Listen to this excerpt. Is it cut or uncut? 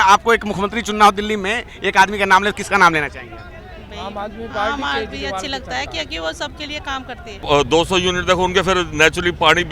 cut